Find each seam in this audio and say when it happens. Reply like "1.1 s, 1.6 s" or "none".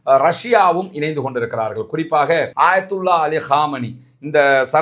2.5 s